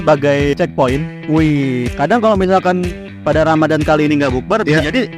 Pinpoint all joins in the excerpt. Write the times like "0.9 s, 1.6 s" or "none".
1.9 s